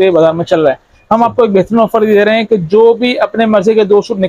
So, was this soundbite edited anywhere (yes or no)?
no